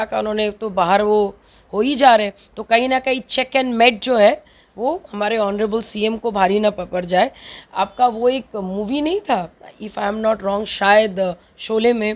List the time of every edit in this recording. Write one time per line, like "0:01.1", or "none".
none

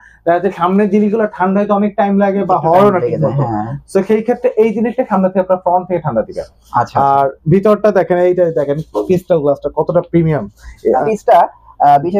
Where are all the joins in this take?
0:11.0

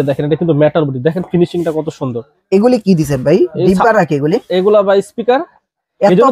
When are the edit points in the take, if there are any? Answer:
none

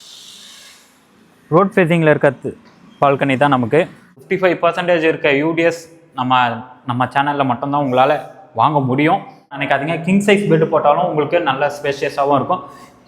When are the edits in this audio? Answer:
0:04.2
0:09.6

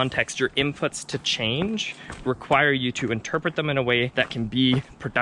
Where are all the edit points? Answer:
0:04.1

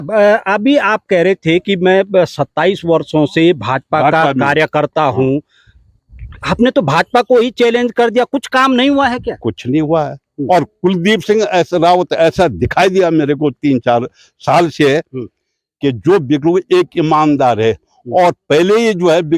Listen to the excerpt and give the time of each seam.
none

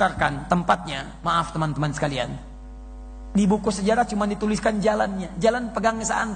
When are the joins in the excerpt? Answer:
none

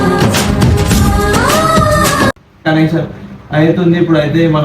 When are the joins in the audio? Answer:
0:02.6

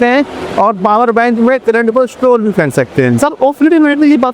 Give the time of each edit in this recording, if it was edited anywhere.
none

